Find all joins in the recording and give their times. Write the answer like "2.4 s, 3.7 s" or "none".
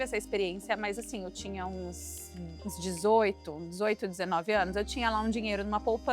none